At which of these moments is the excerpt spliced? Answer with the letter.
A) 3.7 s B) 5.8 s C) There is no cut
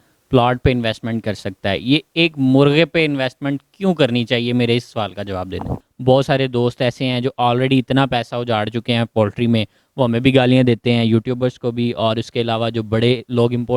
B